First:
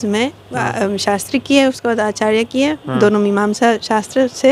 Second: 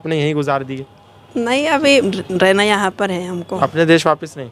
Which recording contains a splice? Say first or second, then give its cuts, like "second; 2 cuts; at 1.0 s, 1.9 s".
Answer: second; 2 cuts; at 2.0 s, 3.6 s